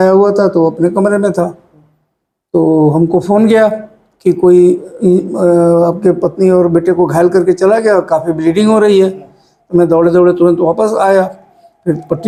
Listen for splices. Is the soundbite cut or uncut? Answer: uncut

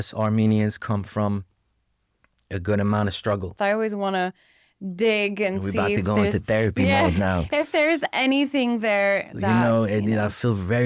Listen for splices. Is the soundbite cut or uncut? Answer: cut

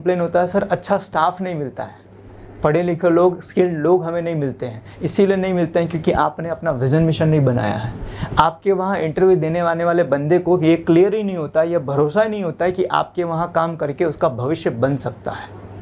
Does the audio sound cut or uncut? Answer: uncut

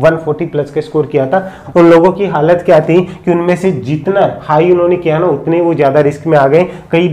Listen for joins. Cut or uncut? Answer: cut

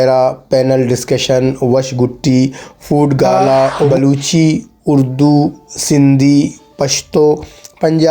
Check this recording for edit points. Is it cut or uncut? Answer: cut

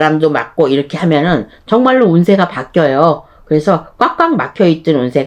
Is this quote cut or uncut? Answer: uncut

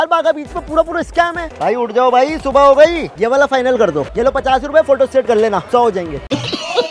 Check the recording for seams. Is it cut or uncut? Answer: cut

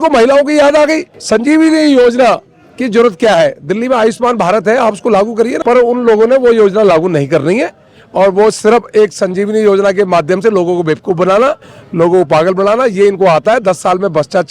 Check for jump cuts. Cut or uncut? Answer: cut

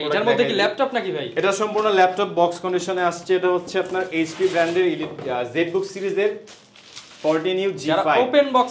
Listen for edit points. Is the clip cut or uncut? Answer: uncut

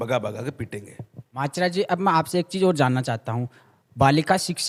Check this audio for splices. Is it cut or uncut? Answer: uncut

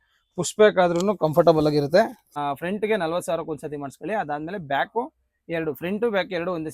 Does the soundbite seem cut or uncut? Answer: cut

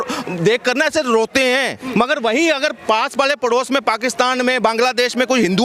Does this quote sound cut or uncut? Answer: cut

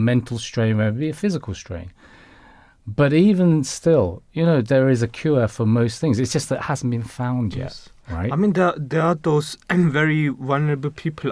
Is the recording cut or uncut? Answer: uncut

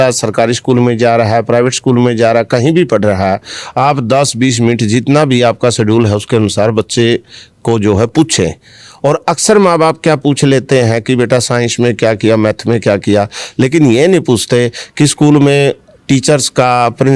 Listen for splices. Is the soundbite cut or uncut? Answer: uncut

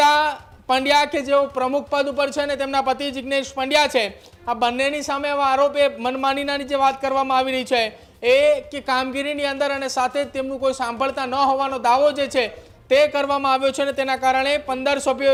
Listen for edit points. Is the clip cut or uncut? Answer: uncut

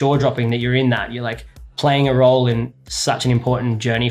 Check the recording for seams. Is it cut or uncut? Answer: cut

